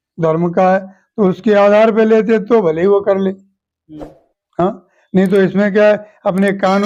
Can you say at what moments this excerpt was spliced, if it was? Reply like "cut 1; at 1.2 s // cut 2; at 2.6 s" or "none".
none